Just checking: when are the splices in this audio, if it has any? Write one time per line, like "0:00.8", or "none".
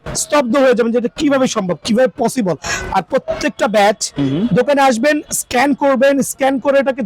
none